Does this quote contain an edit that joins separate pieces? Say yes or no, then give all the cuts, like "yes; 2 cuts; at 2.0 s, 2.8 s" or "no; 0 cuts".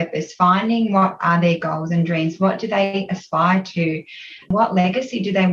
yes; 1 cut; at 4.5 s